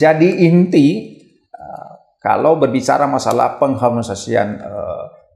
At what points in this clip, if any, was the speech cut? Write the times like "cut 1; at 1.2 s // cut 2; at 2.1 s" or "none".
none

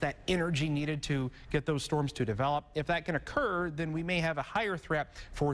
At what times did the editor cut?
none

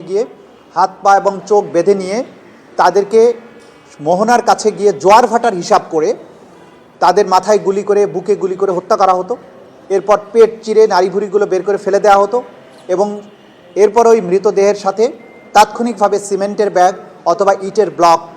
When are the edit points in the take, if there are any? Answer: none

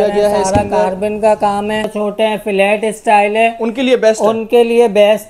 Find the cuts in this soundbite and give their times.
cut 1; at 1.9 s

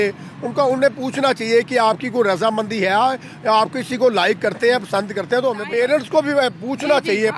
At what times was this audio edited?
cut 1; at 5.6 s

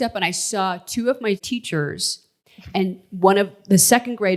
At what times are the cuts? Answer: cut 1; at 1.9 s

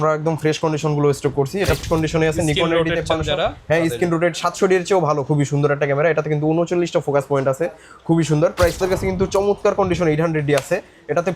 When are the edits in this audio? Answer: cut 1; at 1.8 s // cut 2; at 8.8 s

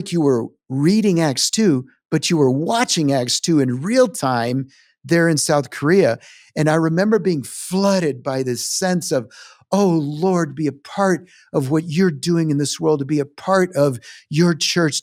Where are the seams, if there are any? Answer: none

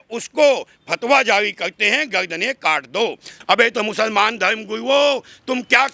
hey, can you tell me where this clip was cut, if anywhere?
cut 1; at 3.3 s

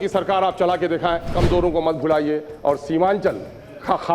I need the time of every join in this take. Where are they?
cut 1; at 1.3 s

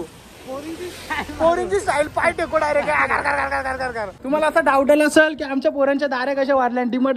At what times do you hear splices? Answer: cut 1; at 4.2 s

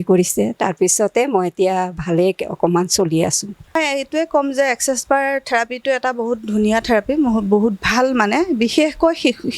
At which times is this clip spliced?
cut 1; at 3.8 s

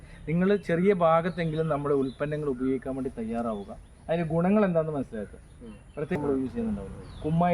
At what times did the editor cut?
cut 1; at 6.2 s

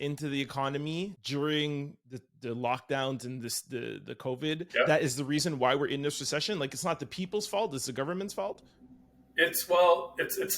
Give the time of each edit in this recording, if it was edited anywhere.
cut 1; at 1.2 s // cut 2; at 4.7 s

